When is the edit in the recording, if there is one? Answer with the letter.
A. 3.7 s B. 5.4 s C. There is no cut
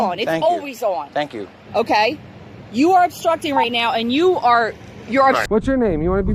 B